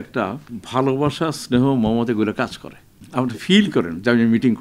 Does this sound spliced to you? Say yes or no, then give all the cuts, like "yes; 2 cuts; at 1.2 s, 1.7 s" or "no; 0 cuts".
yes; 1 cut; at 3.0 s